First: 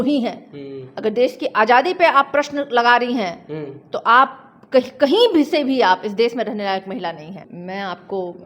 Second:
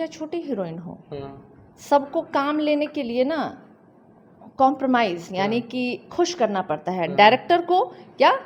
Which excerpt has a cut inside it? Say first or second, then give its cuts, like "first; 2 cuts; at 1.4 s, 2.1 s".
first; 1 cut; at 7.4 s